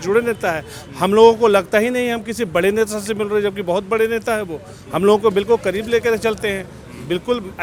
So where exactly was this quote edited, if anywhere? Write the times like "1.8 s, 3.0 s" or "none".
none